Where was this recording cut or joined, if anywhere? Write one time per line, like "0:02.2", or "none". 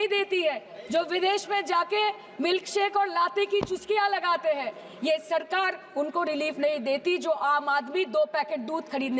none